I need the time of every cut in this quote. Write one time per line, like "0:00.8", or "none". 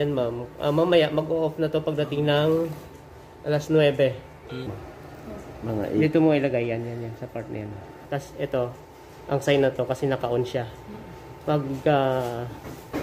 0:04.8
0:08.1